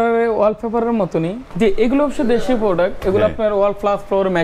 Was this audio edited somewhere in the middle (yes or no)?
yes